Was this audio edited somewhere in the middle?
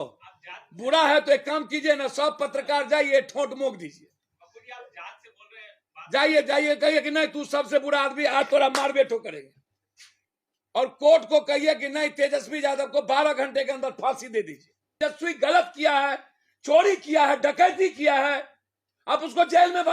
yes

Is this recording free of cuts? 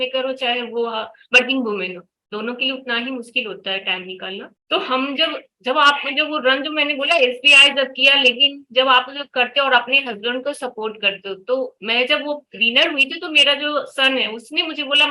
yes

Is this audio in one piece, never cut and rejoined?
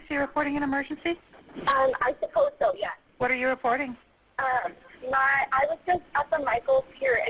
yes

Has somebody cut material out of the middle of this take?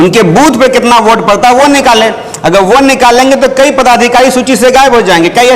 no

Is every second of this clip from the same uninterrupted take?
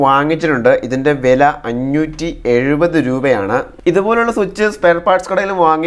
yes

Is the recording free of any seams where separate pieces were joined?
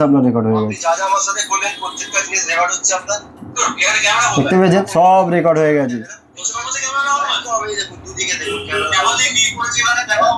yes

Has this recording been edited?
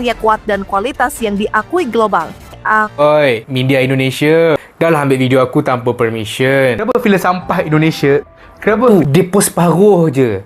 yes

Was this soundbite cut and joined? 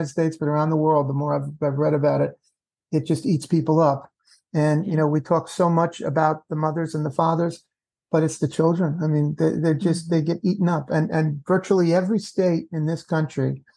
no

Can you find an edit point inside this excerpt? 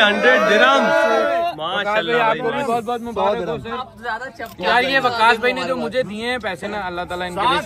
no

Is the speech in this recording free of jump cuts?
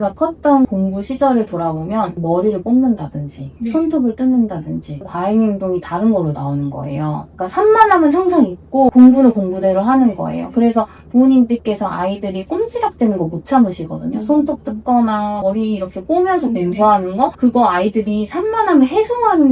yes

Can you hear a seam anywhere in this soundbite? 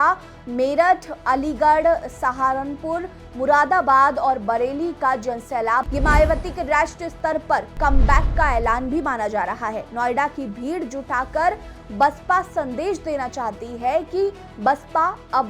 yes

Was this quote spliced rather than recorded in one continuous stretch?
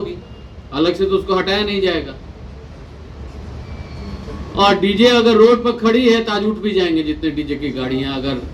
no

